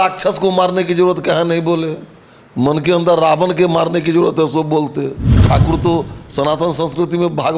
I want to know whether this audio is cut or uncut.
cut